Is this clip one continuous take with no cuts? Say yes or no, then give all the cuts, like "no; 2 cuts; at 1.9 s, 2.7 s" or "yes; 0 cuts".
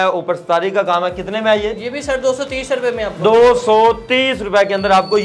yes; 0 cuts